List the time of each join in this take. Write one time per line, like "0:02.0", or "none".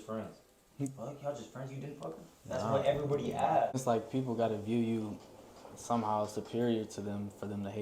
0:03.8